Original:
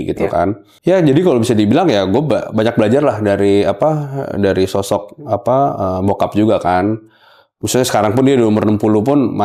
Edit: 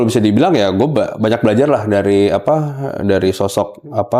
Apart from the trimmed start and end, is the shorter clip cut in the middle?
no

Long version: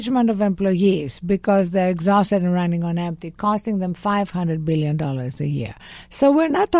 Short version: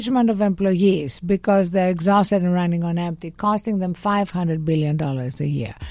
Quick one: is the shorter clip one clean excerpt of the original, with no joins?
yes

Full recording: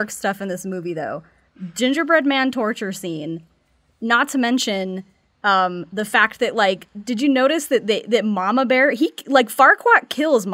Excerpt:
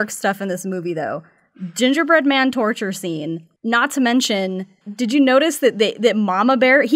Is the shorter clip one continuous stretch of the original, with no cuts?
no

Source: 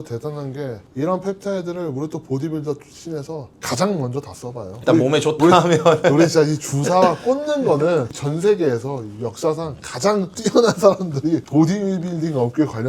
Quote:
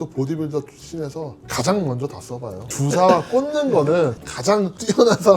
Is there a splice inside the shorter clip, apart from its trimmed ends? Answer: yes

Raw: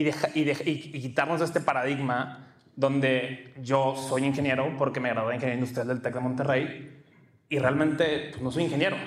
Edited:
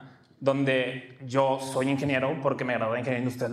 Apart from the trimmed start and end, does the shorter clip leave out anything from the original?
no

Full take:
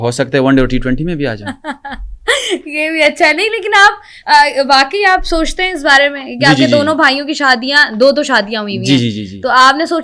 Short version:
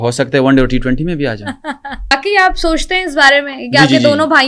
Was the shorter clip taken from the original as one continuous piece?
no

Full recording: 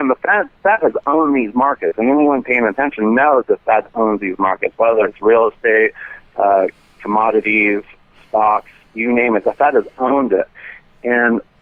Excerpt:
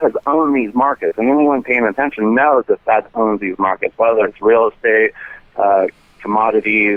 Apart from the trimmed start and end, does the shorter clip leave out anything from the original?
no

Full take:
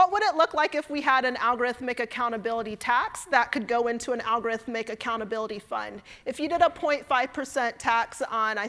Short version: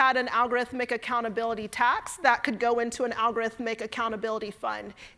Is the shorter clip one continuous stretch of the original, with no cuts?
yes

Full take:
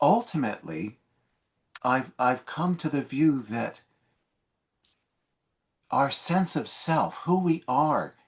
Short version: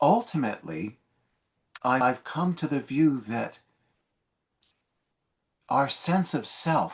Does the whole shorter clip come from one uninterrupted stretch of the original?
no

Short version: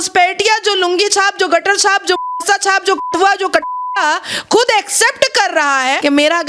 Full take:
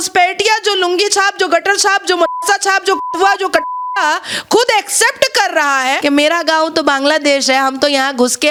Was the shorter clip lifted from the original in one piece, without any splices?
yes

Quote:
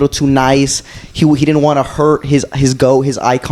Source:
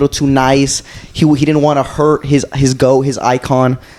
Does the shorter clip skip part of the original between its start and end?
no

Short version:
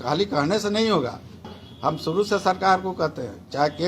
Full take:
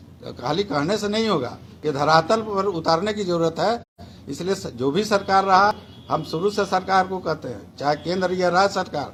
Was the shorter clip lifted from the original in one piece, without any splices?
no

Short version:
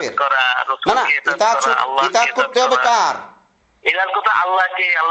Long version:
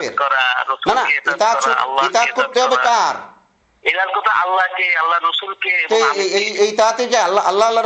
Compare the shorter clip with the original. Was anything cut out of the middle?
no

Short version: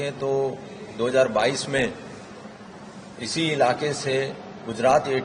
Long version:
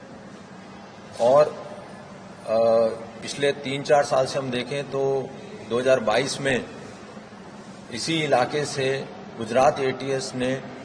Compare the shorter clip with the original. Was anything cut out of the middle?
no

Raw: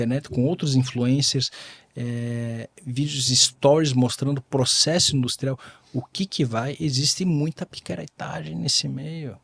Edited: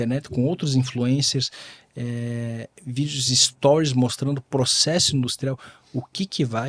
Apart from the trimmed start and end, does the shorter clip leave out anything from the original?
no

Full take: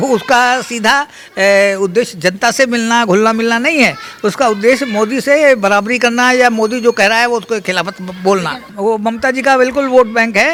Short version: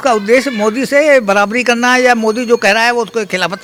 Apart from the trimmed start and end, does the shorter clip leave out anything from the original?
no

